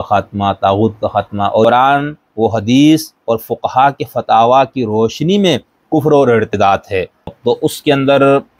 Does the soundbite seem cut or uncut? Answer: cut